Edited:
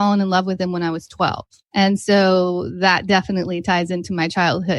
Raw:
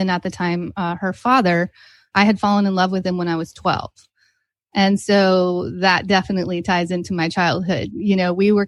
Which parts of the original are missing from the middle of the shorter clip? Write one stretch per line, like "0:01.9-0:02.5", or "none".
0:04.0-0:04.5